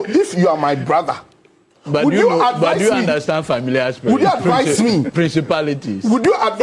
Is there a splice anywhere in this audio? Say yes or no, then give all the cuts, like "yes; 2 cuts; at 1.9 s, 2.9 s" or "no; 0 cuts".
no; 0 cuts